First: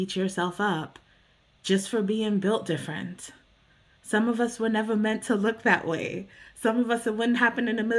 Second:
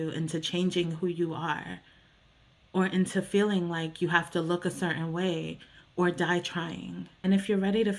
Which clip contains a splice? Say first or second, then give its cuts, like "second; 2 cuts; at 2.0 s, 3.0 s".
second; 1 cut; at 7.0 s